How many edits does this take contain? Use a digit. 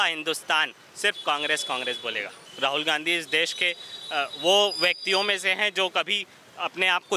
1